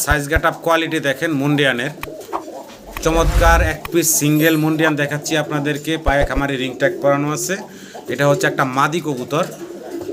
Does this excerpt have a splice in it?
no; 0 cuts

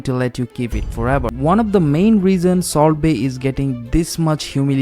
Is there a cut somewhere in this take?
yes; 1 cut; at 1.3 s

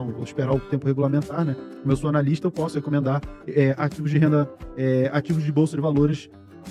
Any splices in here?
no; 0 cuts

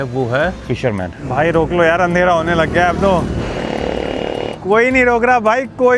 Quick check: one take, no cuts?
no; 3 cuts; at 0.9 s, 3.4 s, 4.6 s

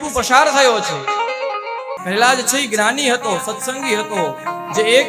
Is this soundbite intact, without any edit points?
no; 1 cut; at 1.9 s

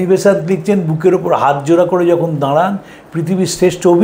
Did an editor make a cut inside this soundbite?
no; 0 cuts

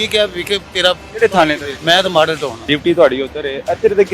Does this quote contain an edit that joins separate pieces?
yes; 2 cuts; at 1.7 s, 2.6 s

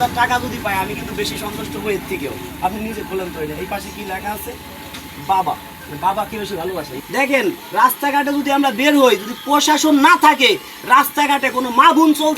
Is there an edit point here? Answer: yes; 1 cut; at 7.0 s

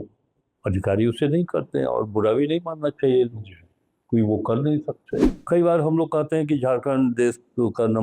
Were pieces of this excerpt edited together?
yes; 1 cut; at 5.3 s

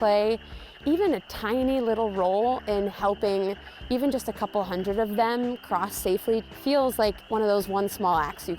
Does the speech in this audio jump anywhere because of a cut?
yes; 2 cuts; at 6.5 s, 7.2 s

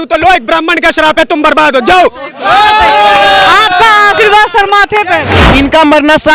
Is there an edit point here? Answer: yes; 1 cut; at 5.4 s

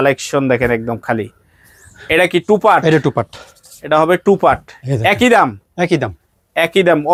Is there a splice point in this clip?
no; 0 cuts

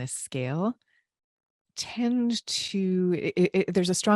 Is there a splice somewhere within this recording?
no; 0 cuts

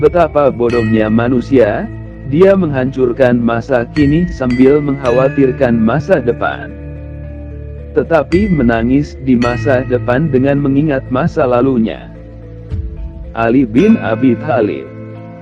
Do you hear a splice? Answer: yes; 2 cuts; at 6.6 s, 7.9 s

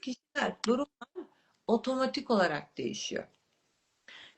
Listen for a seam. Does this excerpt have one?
no; 0 cuts

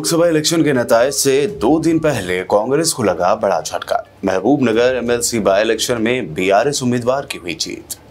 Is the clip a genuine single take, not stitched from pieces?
yes; 0 cuts

